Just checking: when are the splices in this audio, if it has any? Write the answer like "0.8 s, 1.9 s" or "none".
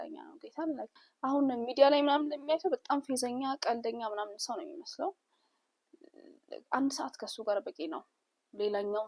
1.0 s